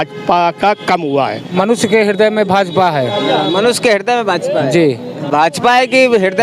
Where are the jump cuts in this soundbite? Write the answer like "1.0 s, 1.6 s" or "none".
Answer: 1.4 s, 5.1 s